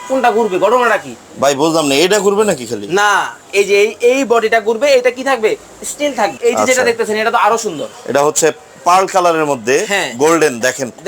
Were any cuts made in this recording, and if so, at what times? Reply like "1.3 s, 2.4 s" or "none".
6.4 s